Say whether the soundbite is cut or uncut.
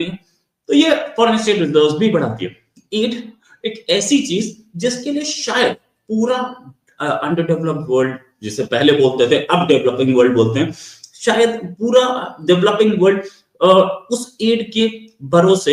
uncut